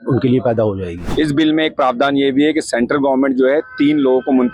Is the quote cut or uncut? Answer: cut